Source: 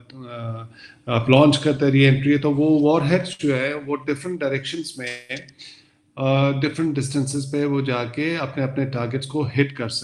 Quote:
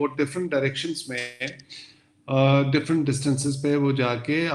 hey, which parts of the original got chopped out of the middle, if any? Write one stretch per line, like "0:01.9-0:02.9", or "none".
none